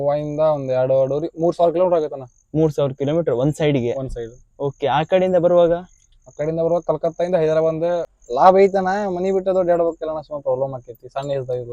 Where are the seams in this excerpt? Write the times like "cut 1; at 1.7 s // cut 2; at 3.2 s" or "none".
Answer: cut 1; at 8.1 s